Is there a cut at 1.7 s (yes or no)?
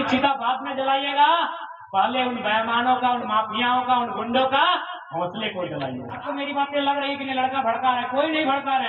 no